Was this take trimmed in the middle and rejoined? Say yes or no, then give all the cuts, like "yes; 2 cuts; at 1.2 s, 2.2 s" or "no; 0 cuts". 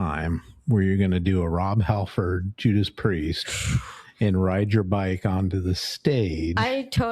no; 0 cuts